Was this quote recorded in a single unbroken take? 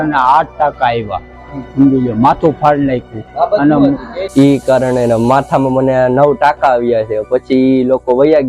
no; 1 cut; at 4.1 s

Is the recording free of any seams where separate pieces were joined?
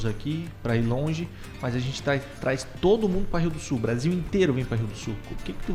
yes; 0 cuts

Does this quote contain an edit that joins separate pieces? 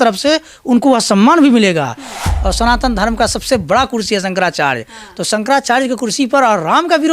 yes; 1 cut; at 2.2 s

